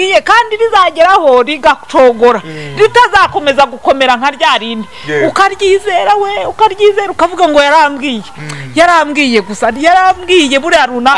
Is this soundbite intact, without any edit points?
yes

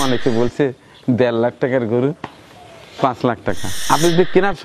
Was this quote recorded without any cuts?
no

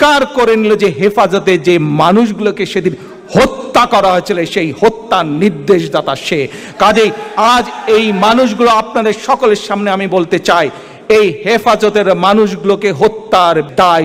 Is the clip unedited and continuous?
yes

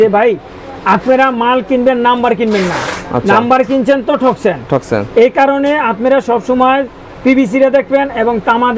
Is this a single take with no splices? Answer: yes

